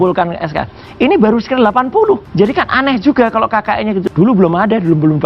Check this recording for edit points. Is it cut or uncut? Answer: cut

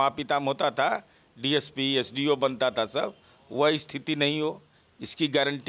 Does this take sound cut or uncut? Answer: uncut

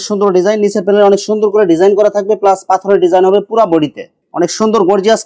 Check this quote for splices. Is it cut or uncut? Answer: cut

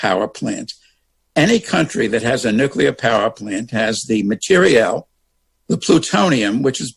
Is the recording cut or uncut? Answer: uncut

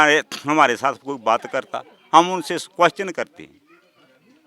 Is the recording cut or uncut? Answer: uncut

